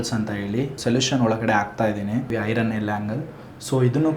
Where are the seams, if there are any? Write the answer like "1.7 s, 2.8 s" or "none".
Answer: 0.8 s, 2.3 s